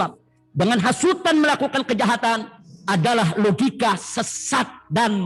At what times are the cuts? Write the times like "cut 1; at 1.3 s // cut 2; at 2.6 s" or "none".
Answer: none